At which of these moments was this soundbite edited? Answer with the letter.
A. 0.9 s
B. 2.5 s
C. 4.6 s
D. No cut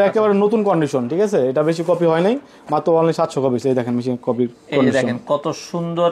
D